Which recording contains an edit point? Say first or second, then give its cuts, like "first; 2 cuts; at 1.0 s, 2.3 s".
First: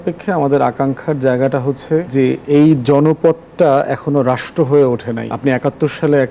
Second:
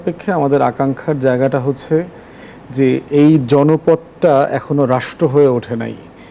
first; 2 cuts; at 2.1 s, 5.3 s